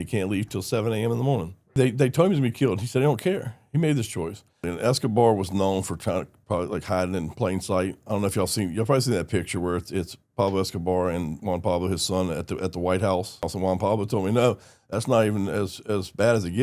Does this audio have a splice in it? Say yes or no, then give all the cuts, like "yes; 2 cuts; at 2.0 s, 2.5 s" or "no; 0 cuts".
yes; 3 cuts; at 1.7 s, 4.7 s, 13.5 s